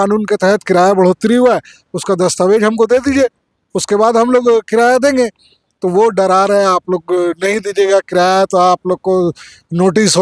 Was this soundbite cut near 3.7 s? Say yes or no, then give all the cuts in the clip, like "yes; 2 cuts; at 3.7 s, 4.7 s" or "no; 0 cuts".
no; 0 cuts